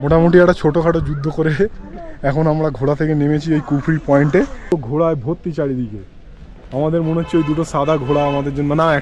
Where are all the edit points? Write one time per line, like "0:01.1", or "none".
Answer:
0:04.7